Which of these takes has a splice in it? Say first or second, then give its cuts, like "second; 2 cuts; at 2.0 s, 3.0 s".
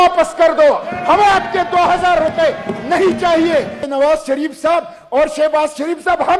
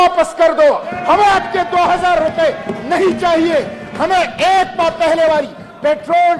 first; 1 cut; at 3.8 s